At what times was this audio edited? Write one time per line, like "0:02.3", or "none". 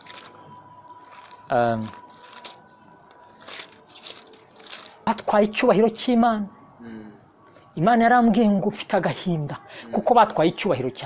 0:05.1